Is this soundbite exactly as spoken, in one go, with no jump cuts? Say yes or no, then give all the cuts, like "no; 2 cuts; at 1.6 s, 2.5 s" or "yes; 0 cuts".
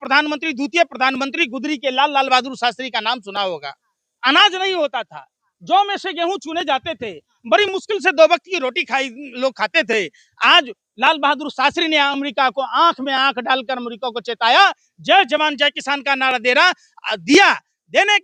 yes; 0 cuts